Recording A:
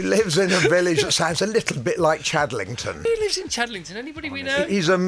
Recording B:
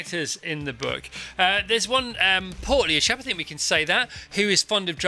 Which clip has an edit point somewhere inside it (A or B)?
A